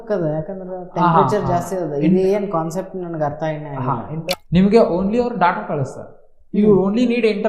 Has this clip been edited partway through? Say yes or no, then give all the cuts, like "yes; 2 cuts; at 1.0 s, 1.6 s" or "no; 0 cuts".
yes; 1 cut; at 4.3 s